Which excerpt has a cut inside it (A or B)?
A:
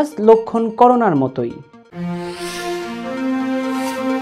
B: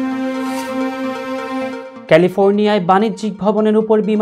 B